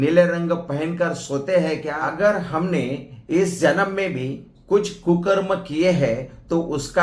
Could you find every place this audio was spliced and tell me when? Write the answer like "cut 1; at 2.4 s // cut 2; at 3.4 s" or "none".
cut 1; at 2.0 s